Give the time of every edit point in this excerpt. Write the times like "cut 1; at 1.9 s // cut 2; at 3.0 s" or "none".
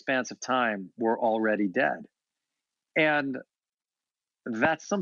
none